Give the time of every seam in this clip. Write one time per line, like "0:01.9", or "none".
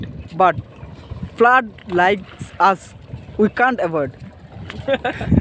none